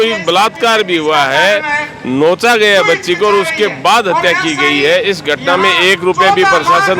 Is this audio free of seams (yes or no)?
yes